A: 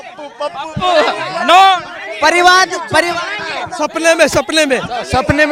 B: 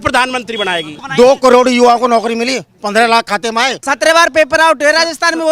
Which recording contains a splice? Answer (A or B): B